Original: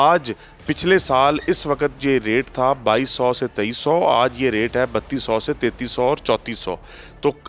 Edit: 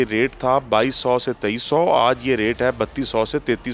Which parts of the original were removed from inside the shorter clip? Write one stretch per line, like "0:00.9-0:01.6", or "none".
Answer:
none

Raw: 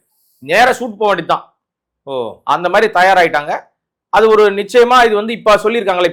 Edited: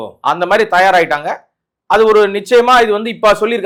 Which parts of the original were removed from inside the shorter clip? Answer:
none

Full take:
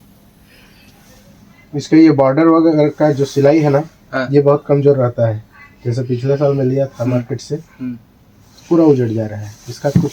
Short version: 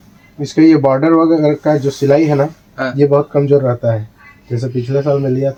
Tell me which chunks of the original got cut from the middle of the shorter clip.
none

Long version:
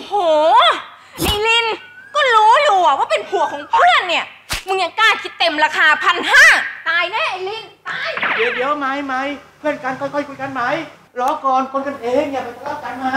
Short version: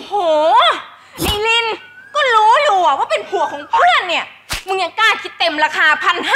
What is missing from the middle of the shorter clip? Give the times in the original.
none

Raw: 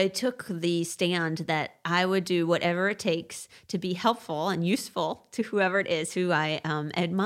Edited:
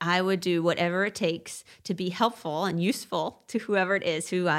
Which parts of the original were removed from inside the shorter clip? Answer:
none

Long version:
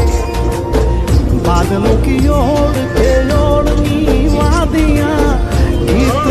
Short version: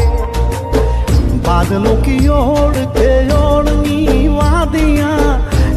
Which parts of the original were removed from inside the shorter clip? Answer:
none

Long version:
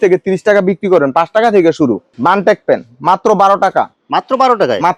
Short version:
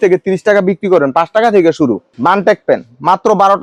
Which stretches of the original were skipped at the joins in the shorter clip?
none

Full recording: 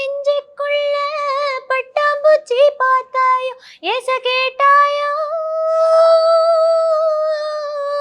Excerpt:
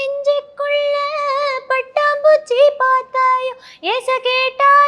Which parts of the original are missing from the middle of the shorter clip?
none

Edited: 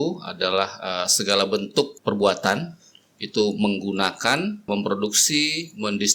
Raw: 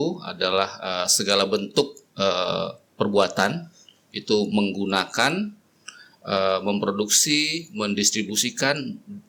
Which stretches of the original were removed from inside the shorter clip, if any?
0:01.9-0:02.9
0:05.6-0:06.6

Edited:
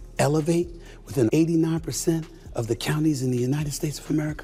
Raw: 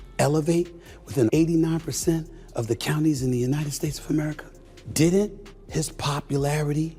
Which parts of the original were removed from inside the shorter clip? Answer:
none

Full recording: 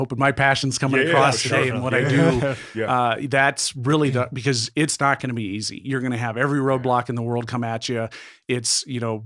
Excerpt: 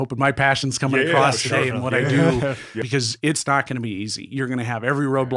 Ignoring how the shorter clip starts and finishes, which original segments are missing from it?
0:02.8-0:04.3

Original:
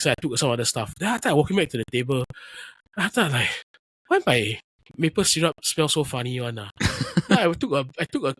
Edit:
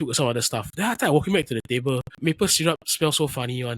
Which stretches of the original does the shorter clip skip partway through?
0:02.3-0:04.9

